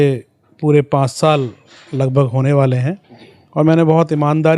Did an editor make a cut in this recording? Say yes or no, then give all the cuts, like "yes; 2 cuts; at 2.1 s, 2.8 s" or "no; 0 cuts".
no; 0 cuts